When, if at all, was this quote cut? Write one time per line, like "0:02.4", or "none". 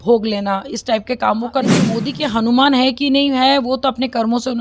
0:02.0